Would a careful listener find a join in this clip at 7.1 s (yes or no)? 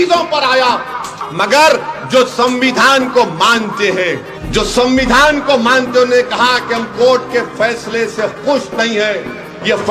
no